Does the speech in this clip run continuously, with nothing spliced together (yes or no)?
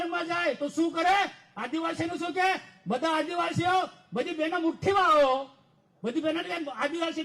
yes